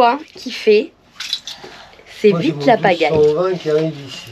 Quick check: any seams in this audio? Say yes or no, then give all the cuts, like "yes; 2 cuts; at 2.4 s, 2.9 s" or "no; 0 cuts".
no; 0 cuts